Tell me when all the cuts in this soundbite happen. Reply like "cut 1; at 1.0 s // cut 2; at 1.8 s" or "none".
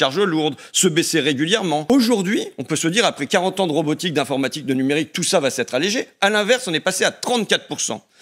cut 1; at 1.8 s

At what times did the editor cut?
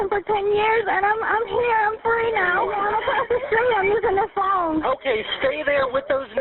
cut 1; at 2.6 s

